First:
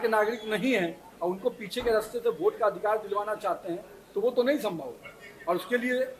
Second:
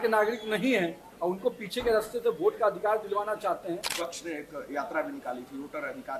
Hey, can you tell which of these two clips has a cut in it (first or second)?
second